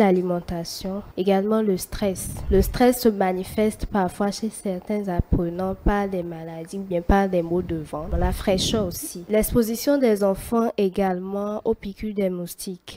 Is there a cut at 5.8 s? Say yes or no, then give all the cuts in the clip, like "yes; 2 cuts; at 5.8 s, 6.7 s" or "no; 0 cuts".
no; 4 cuts; at 1.1 s, 2.3 s, 8.1 s, 9.2 s